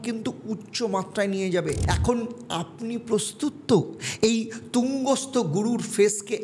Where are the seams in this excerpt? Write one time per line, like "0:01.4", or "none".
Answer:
0:01.8